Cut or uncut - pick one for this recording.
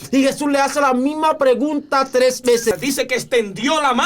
cut